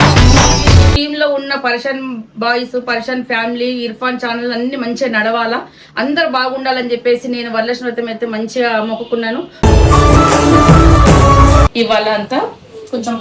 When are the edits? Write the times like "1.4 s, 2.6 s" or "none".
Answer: 1.0 s, 9.6 s, 11.6 s